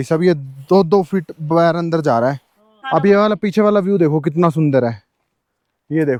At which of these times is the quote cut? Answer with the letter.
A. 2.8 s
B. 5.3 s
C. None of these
C